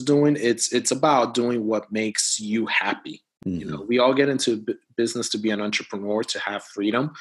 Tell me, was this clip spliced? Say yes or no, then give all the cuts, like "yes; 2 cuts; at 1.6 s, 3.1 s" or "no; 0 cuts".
no; 0 cuts